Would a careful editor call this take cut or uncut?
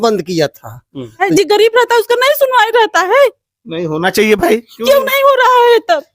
cut